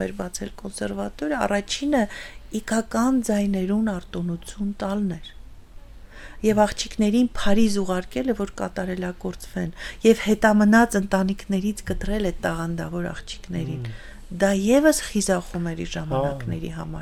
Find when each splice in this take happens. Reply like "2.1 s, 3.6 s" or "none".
none